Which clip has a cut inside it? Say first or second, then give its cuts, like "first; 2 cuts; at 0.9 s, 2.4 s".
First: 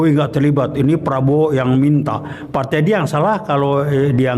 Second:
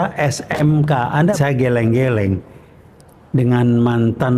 second; 1 cut; at 1.4 s